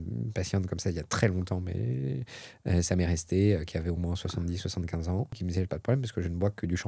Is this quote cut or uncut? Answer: cut